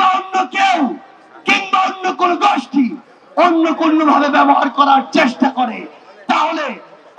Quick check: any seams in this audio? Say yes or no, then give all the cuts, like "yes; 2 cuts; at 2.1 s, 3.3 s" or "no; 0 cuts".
no; 0 cuts